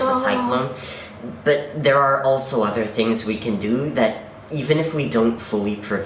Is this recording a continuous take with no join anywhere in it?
yes; 0 cuts

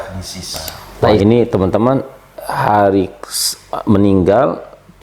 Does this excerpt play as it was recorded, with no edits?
no; 1 cut; at 1.2 s

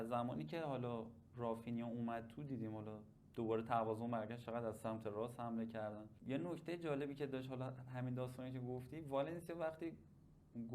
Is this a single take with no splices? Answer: yes; 0 cuts

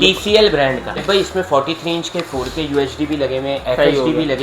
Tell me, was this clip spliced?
yes; 1 cut; at 1.0 s

